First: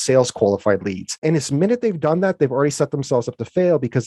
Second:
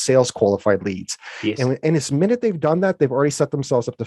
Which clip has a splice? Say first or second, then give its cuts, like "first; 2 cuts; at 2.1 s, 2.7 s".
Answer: first; 1 cut; at 1.2 s